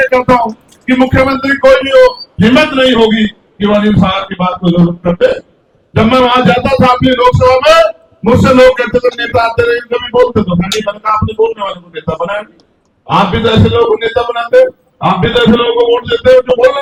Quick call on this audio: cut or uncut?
uncut